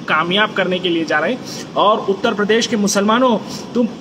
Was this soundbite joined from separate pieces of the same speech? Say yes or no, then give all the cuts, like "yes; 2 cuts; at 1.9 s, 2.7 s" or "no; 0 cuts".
no; 0 cuts